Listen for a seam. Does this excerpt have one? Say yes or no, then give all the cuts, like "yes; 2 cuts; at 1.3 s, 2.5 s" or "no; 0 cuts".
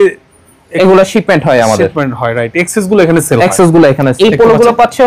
yes; 1 cut; at 4.1 s